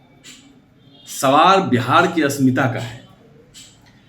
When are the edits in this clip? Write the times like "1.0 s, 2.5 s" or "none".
none